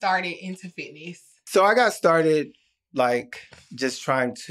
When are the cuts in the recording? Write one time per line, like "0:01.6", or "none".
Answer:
0:01.3